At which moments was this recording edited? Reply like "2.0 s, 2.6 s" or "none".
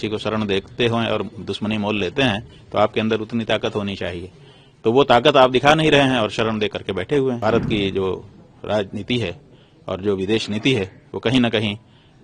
7.4 s